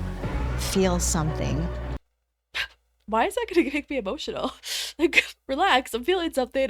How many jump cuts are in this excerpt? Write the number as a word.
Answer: one